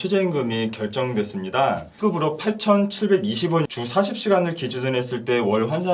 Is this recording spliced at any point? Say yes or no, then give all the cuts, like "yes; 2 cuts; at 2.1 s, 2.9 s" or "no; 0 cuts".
yes; 2 cuts; at 1.9 s, 3.7 s